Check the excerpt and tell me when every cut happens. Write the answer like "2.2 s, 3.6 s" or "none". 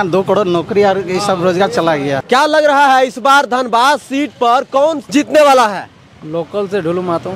2.2 s, 5.0 s